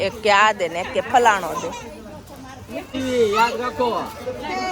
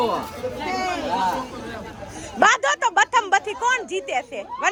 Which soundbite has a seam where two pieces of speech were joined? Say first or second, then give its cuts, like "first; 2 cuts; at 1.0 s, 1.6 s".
first; 1 cut; at 2.9 s